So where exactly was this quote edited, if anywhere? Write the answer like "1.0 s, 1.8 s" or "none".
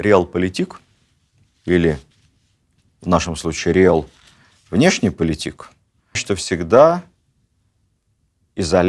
6.2 s